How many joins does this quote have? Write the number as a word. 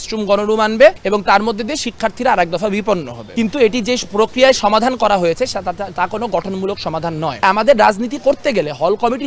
three